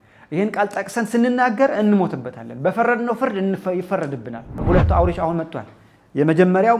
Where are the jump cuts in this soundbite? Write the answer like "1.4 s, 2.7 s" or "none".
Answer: 4.6 s